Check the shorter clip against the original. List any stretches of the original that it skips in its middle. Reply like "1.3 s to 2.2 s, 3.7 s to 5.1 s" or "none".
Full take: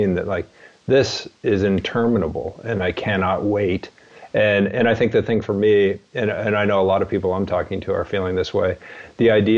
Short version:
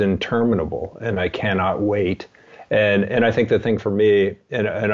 none